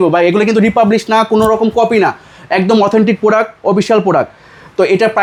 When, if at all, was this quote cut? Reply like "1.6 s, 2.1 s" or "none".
none